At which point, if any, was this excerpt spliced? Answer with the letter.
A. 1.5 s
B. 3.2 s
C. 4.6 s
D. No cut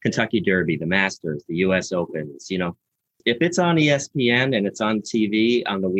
B